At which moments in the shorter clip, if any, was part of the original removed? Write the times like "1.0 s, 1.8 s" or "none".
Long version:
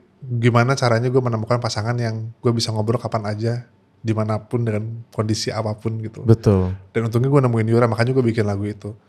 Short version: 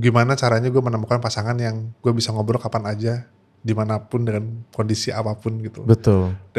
none